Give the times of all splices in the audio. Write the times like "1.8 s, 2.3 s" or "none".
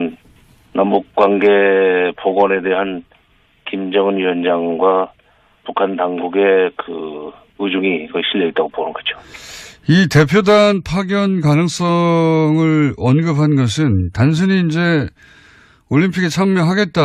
none